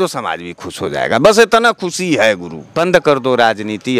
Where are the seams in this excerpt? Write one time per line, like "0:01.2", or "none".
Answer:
0:02.8